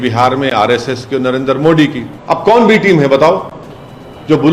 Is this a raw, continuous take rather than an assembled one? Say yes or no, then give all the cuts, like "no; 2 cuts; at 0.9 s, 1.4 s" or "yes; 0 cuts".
no; 1 cut; at 2.1 s